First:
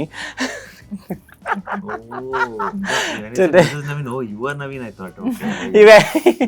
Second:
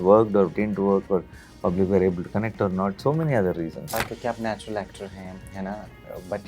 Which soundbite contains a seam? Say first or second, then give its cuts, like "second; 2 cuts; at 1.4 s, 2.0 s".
second; 1 cut; at 3.9 s